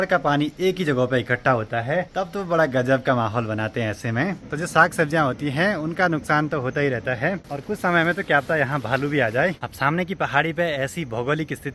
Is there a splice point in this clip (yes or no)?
yes